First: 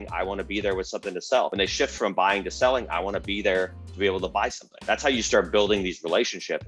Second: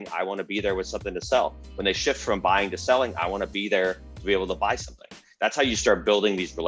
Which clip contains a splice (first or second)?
first